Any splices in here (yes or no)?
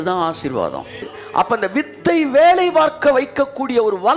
yes